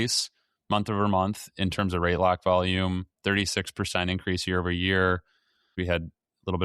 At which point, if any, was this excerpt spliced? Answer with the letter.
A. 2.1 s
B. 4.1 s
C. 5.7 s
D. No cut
C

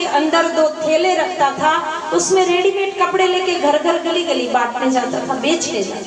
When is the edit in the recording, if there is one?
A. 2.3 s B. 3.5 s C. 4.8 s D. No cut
D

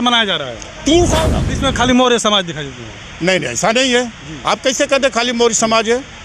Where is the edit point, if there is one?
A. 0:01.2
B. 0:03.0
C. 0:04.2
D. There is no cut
A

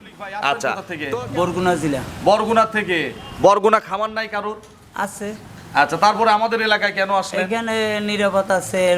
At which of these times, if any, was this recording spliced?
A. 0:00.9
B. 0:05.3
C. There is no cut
A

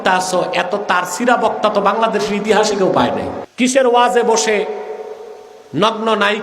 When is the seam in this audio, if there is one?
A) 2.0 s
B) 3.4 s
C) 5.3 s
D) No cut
B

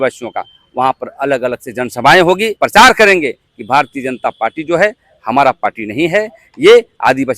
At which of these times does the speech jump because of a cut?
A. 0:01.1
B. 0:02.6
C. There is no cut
B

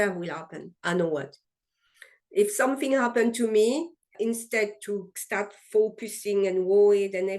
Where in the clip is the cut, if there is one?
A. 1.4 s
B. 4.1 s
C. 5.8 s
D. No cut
B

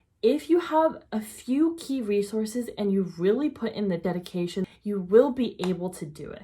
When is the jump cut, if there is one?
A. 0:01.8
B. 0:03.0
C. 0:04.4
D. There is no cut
C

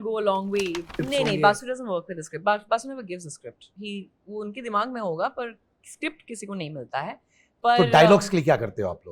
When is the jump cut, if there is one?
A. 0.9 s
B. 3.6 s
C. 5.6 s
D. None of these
A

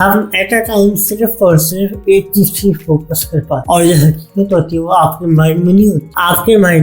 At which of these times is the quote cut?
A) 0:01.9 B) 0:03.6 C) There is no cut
B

